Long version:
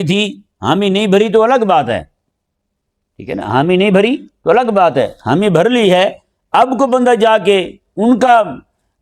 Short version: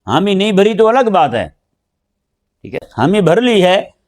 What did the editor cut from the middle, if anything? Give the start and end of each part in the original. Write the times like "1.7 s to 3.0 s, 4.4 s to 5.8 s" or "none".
3.4 s to 5.2 s